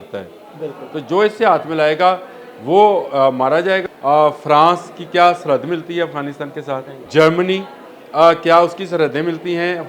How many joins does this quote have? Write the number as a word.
two